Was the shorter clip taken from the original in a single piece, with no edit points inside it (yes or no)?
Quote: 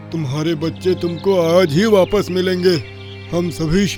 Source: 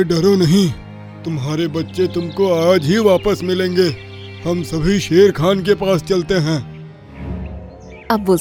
yes